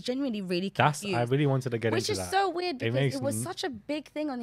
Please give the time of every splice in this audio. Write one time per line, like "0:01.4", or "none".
none